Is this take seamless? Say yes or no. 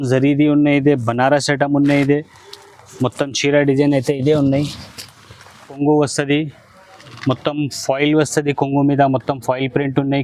no